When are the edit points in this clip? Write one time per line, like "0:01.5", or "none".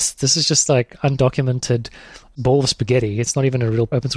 none